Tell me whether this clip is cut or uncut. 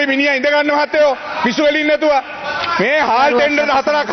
uncut